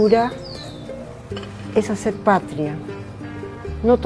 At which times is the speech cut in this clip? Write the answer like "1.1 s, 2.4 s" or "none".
1.7 s